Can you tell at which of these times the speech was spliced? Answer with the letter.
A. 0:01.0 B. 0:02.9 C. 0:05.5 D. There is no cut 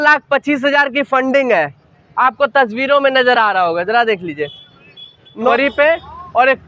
C